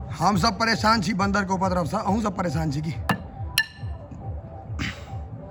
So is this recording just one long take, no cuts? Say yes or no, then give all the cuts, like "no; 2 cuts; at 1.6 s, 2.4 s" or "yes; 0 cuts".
yes; 0 cuts